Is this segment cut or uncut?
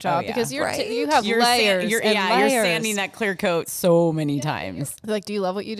cut